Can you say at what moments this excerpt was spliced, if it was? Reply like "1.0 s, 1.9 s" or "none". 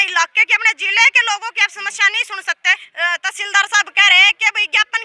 2.9 s